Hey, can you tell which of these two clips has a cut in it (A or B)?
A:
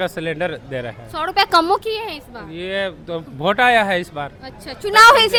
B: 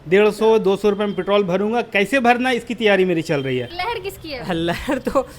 B